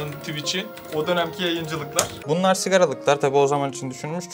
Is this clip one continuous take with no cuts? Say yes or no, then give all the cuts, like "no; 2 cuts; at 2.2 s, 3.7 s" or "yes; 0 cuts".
no; 1 cut; at 2.2 s